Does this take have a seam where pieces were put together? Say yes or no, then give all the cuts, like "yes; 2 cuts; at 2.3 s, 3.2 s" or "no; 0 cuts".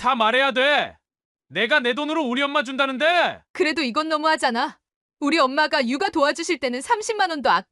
yes; 1 cut; at 3.4 s